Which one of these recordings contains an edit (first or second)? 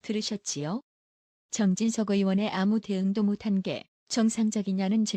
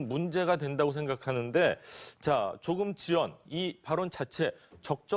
first